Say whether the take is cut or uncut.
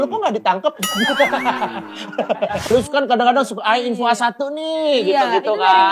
cut